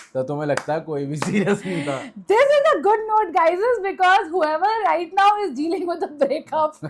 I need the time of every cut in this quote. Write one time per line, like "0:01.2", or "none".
none